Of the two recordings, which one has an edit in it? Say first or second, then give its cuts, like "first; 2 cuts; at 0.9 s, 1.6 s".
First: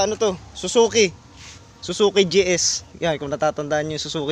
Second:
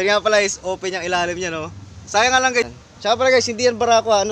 second; 1 cut; at 2.7 s